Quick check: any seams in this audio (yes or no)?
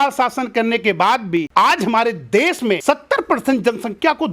yes